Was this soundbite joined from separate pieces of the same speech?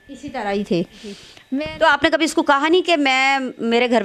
yes; 1 cut; at 1.3 s

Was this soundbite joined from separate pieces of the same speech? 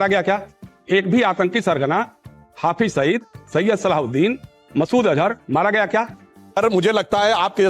yes; 1 cut; at 6.6 s

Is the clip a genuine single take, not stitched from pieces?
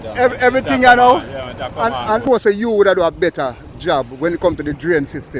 no; 1 cut; at 2.4 s

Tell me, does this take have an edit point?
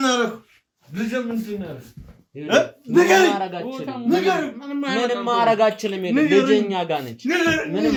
no; 0 cuts

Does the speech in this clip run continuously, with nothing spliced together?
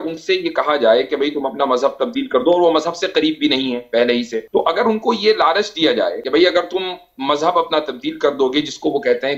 no; 2 cuts; at 4.5 s, 6.2 s

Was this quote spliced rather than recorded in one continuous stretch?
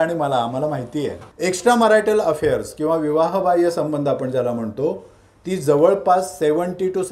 yes; 1 cut; at 1.2 s

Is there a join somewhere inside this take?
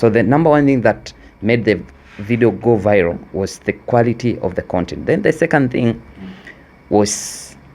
yes; 1 cut; at 1.9 s

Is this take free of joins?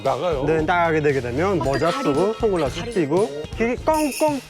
no; 1 cut; at 3.4 s

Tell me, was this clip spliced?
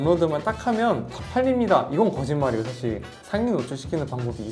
no; 0 cuts

